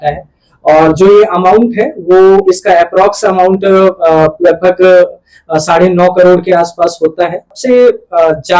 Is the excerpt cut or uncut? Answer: cut